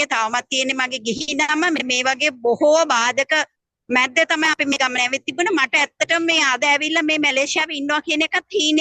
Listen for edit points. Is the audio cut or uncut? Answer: uncut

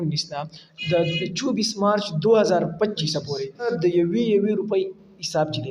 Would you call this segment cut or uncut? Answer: cut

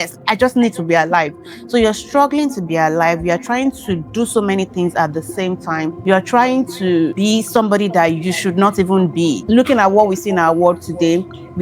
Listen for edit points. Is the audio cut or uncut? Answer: cut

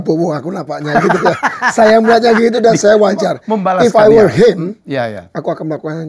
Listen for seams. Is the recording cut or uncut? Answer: uncut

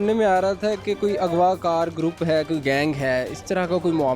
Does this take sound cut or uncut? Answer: uncut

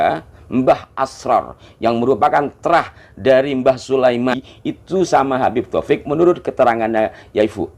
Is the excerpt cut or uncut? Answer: cut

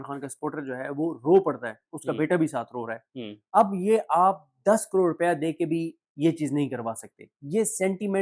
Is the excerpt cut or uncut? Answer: uncut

